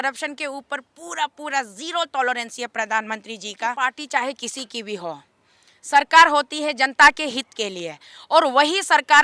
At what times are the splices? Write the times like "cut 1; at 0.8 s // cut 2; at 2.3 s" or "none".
cut 1; at 3.8 s

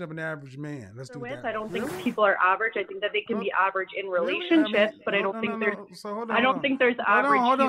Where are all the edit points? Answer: cut 1; at 1.4 s

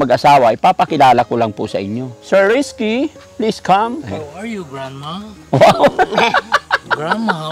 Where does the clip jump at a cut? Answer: cut 1; at 2.1 s // cut 2; at 4.1 s

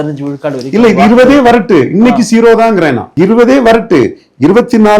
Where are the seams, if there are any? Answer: none

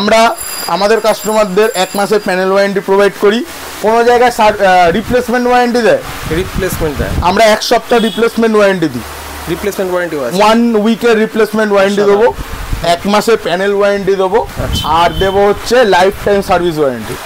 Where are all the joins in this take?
none

